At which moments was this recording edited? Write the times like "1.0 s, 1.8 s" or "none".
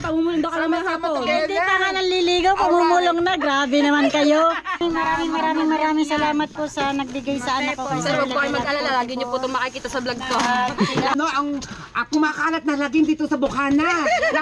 4.8 s, 11.1 s